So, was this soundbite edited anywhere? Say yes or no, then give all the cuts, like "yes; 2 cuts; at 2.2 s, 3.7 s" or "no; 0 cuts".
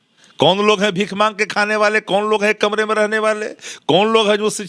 no; 0 cuts